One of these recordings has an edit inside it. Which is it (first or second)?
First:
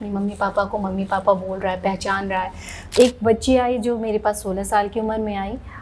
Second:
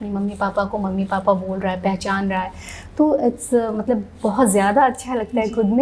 first